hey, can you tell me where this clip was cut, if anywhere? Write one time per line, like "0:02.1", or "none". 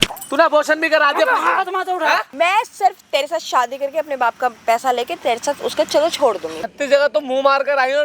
0:02.3
0:06.6